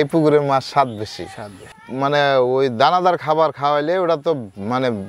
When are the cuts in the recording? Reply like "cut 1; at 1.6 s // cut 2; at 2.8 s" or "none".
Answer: cut 1; at 1.6 s